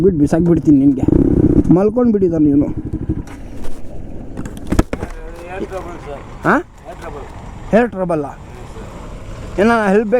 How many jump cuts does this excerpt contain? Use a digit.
1